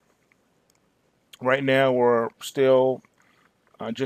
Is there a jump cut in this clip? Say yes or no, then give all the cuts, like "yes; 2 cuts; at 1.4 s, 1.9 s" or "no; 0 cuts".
no; 0 cuts